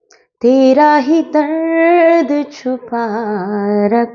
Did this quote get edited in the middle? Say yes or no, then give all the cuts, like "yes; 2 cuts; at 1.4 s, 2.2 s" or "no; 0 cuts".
no; 0 cuts